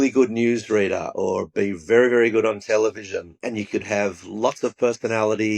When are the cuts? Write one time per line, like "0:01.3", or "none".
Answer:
0:03.3